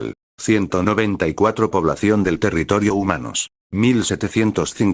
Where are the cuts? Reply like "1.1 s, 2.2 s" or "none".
2.9 s